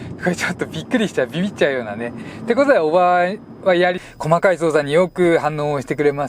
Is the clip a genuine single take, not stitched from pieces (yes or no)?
no